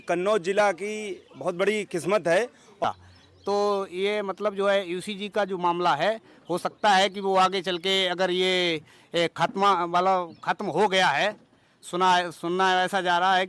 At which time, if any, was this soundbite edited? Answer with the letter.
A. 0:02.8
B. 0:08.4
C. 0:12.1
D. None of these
A